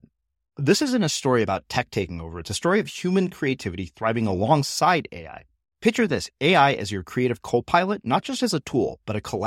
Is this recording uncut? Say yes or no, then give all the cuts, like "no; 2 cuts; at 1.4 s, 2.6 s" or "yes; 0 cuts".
yes; 0 cuts